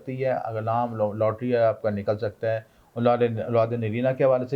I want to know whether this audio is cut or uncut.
uncut